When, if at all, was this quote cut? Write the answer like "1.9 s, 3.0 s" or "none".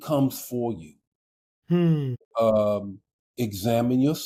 none